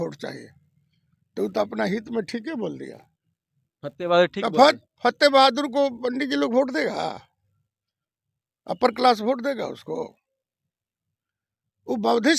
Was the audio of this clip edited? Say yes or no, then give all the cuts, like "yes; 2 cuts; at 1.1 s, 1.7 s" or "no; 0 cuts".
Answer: no; 0 cuts